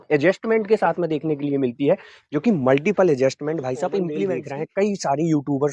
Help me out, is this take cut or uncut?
cut